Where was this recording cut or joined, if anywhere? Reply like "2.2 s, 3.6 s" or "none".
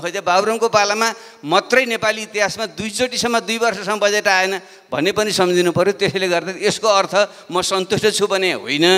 none